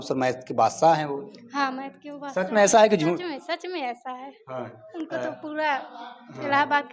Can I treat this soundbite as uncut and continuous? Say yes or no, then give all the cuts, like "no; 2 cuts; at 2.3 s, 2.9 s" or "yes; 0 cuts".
yes; 0 cuts